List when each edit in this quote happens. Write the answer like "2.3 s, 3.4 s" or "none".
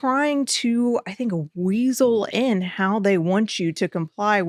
none